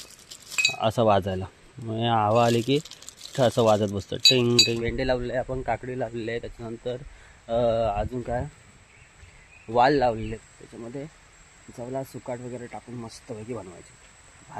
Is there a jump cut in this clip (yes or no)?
yes